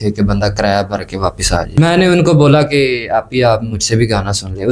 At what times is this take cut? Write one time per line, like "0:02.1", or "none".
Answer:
0:01.7